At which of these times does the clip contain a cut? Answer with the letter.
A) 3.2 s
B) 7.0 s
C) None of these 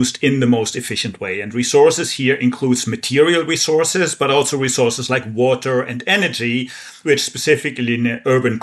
C